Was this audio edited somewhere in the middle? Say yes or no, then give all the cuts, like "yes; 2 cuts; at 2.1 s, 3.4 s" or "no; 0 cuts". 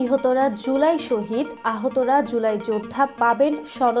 no; 0 cuts